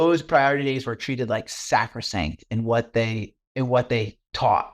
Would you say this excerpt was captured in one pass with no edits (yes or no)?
yes